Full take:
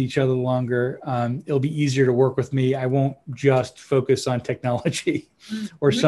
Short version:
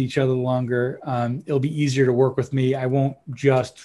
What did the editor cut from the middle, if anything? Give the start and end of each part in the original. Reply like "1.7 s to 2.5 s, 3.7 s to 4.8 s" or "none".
none